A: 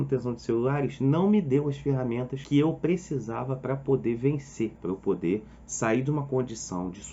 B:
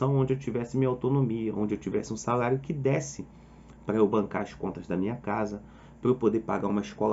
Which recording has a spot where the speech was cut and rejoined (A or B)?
A